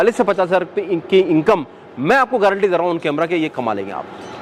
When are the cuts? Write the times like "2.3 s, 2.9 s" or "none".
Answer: none